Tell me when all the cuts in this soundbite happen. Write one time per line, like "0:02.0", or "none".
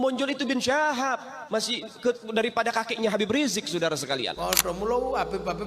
0:04.3